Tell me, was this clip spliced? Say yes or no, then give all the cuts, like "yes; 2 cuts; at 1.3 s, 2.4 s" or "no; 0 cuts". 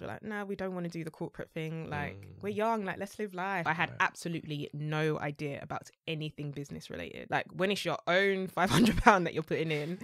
yes; 2 cuts; at 3.7 s, 7.2 s